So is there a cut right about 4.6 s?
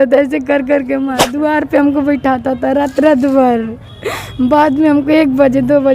no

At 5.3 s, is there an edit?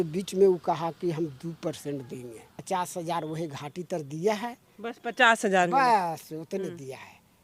no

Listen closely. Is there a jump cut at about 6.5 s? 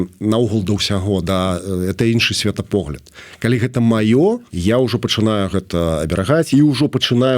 yes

